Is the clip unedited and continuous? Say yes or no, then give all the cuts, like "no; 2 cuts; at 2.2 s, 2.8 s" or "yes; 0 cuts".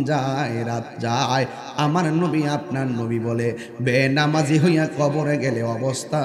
yes; 0 cuts